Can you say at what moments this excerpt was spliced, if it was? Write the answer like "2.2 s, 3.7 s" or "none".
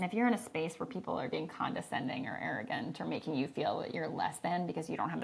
none